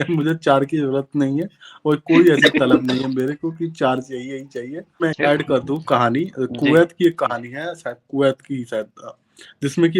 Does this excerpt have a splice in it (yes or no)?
yes